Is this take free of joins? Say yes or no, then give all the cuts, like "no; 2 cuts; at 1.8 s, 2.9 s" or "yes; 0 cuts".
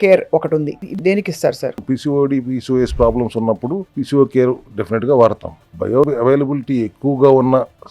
no; 5 cuts; at 0.9 s, 1.8 s, 3.9 s, 4.7 s, 5.9 s